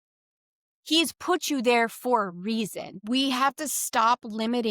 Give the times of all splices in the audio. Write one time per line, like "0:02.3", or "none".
0:02.9